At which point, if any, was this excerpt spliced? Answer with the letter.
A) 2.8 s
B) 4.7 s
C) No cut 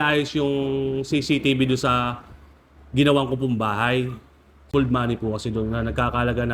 B